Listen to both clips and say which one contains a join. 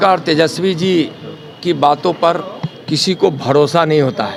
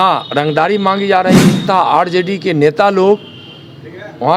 second; 1 cut; at 1.6 s

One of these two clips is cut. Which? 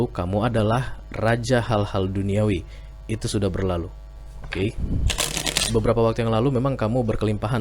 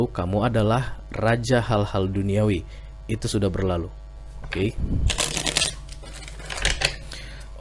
first; 1 cut; at 5.6 s

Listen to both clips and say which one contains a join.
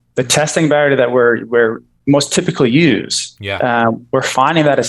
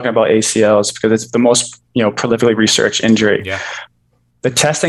first; 1 cut; at 1.9 s

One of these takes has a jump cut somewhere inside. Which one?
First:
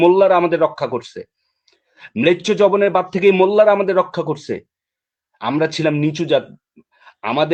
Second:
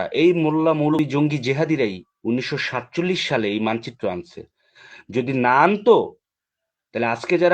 second; 1 cut; at 0.9 s

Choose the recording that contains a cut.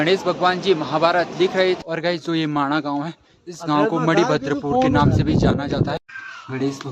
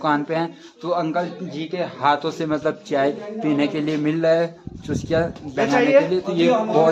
first; 2 cuts; at 1.8 s, 6.0 s

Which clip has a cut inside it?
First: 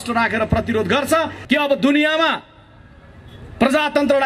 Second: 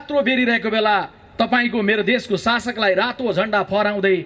first; 1 cut; at 1.4 s

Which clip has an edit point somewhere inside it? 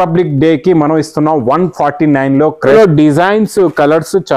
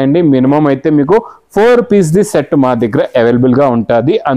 first; 1 cut; at 2.7 s

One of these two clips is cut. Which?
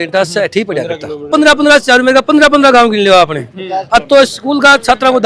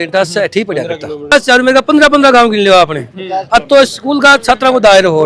second; 1 cut; at 1.3 s

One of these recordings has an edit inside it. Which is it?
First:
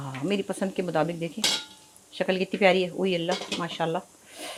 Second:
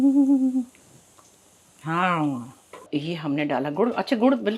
second; 1 cut; at 2.9 s

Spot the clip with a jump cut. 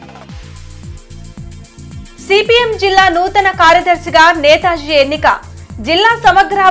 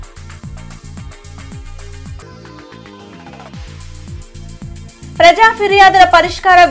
first; 1 cut; at 1.6 s

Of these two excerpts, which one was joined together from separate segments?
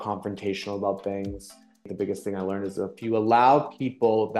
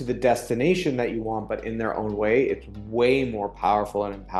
first; 1 cut; at 1.5 s

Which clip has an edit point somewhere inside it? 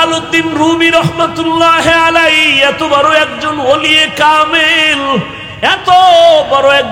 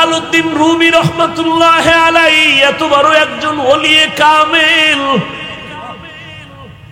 first; 1 cut; at 5.4 s

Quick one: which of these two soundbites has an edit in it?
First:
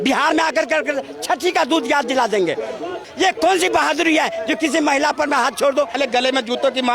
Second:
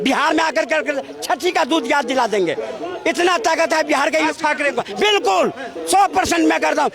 first; 2 cuts; at 3.0 s, 5.9 s

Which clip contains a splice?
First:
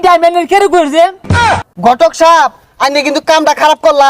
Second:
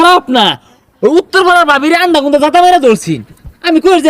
first; 1 cut; at 1.4 s

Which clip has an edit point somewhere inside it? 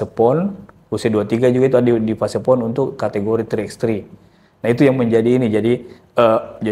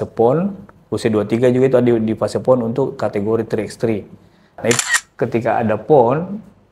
second; 1 cut; at 4.8 s

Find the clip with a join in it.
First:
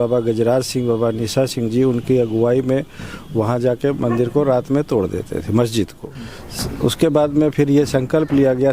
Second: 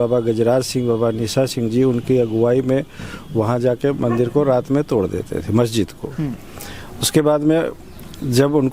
first; 1 cut; at 6.1 s

